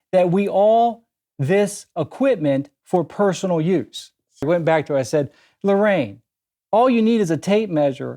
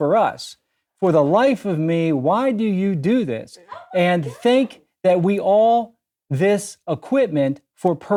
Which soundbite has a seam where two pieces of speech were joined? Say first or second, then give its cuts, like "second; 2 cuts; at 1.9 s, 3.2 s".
first; 1 cut; at 4.4 s